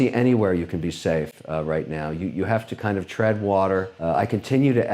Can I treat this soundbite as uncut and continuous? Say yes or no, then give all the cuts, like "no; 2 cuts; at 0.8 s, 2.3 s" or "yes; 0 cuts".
yes; 0 cuts